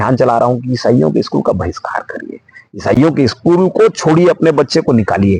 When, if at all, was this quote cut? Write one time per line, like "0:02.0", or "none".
none